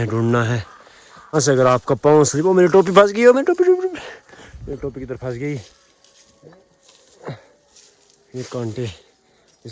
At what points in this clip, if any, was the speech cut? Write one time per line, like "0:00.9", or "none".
0:01.2

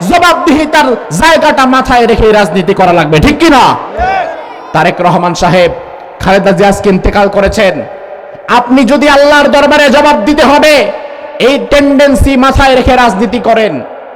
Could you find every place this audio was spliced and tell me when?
none

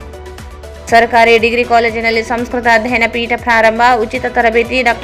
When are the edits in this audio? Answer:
0:00.9

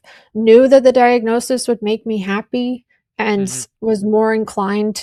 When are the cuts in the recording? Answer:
none

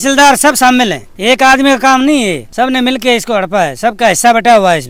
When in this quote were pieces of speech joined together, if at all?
none

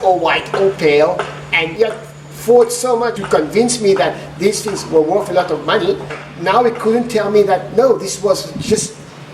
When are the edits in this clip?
0:01.6
0:03.2
0:06.2

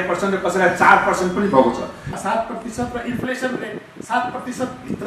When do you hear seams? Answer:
0:02.1

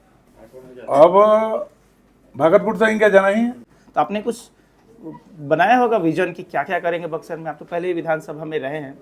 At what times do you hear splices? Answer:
0:03.7

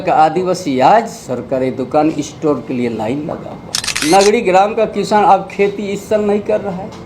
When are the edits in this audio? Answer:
0:01.2
0:03.9

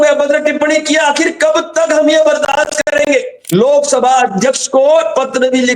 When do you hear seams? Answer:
0:03.4

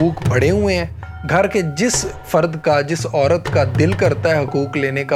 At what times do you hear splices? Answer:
none

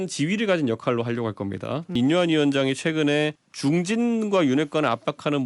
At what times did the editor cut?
0:01.9
0:03.4

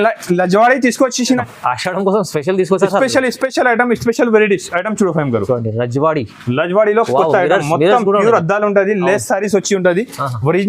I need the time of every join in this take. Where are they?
0:01.4

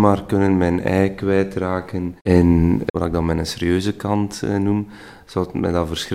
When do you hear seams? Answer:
none

